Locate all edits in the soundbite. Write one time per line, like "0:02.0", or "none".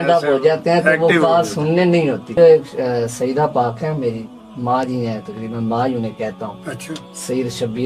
0:02.4